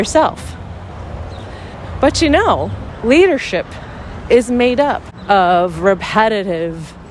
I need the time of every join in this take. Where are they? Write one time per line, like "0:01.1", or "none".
0:05.1